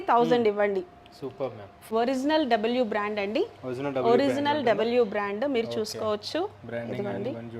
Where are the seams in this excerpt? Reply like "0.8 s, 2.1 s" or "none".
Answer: 1.9 s